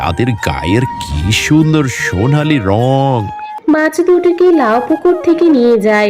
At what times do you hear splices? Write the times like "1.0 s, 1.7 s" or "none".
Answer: 3.5 s